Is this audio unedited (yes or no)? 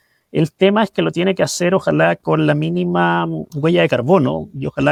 yes